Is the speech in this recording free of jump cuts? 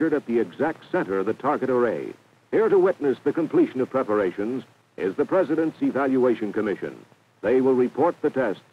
no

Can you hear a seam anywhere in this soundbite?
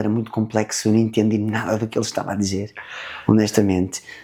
no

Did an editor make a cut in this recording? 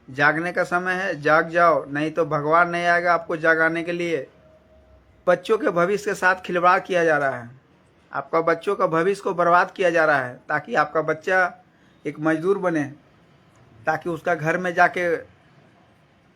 yes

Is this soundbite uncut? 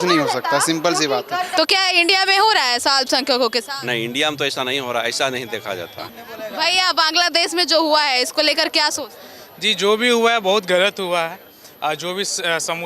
no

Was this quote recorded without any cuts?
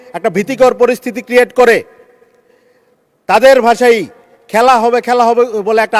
yes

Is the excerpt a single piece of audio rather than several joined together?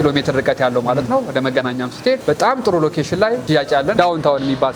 no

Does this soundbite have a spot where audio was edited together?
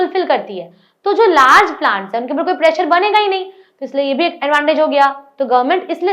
no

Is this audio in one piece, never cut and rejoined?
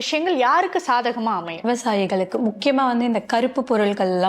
no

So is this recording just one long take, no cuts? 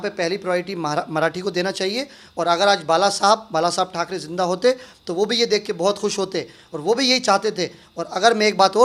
yes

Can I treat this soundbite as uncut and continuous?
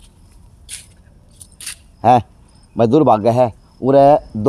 yes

